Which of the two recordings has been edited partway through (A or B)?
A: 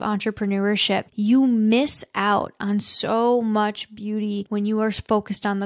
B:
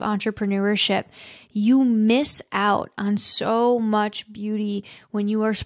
A